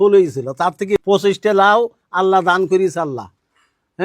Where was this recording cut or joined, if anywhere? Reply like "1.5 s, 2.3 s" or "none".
1.0 s